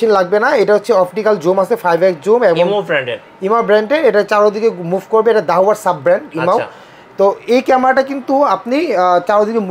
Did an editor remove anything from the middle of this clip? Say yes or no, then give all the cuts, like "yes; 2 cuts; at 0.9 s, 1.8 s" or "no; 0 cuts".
no; 0 cuts